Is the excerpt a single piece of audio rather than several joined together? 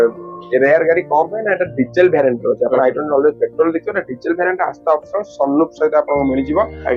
yes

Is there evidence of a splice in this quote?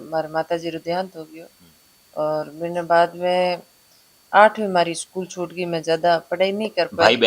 no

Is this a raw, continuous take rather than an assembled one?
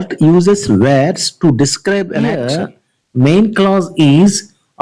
no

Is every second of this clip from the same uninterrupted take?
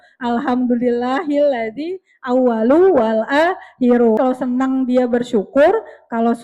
no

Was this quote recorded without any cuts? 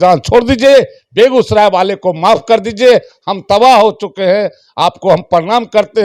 yes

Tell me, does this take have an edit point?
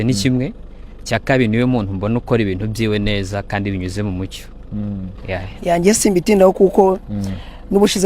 yes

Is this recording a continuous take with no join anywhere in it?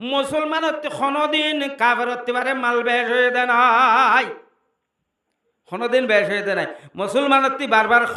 yes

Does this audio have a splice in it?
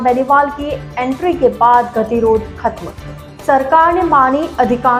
no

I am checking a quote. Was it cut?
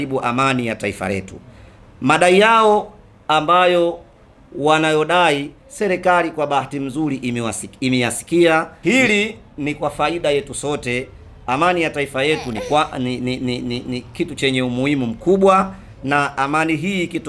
yes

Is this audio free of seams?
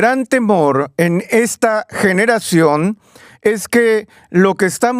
yes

